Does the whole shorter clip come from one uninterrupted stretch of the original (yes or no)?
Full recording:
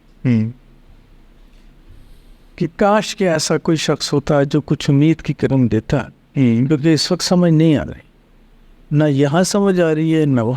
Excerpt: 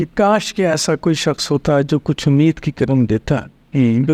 yes